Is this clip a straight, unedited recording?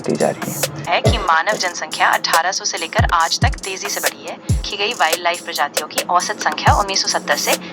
no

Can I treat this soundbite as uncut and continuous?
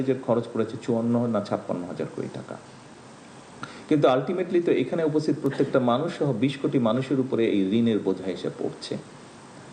yes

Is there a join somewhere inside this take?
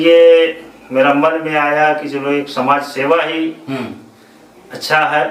no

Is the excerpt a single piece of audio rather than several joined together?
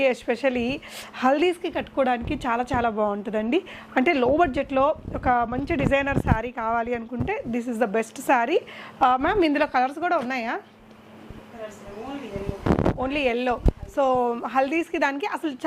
yes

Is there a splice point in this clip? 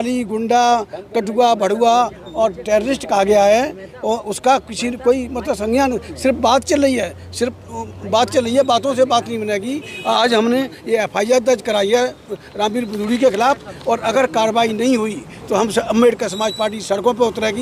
no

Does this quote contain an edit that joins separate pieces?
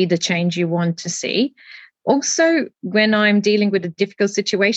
no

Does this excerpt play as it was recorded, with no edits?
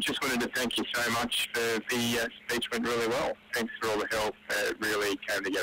no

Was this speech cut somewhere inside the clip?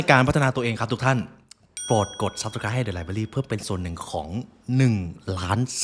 no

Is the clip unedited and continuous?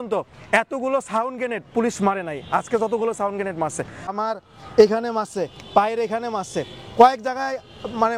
no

